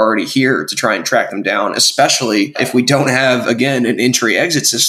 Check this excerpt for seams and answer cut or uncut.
cut